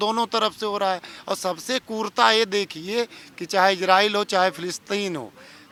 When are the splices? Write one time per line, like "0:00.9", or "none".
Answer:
none